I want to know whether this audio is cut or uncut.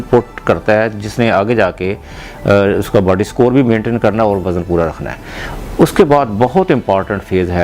uncut